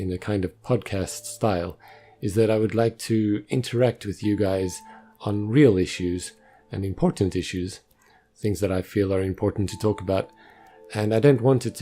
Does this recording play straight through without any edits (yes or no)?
no